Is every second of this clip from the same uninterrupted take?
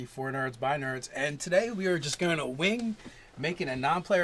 no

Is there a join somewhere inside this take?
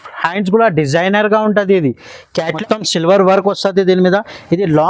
yes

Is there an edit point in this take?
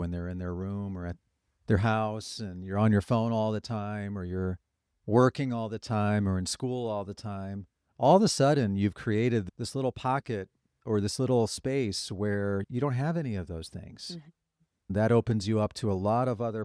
yes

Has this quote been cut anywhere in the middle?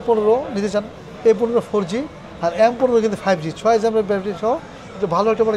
no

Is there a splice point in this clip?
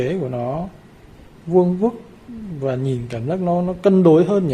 no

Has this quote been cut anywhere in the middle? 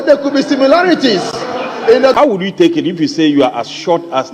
yes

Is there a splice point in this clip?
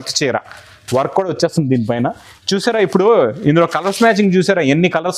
no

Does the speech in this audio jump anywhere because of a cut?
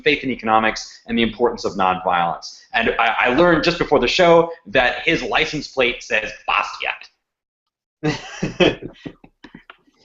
yes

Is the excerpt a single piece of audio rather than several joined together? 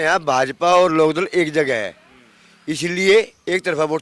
yes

